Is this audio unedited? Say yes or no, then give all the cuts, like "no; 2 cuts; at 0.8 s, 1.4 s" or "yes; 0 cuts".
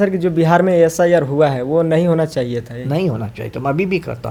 yes; 0 cuts